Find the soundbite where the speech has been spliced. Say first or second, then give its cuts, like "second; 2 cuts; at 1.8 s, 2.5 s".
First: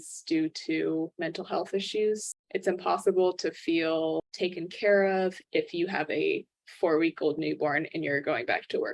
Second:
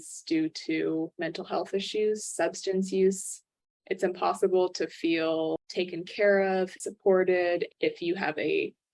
first; 2 cuts; at 2.3 s, 5.4 s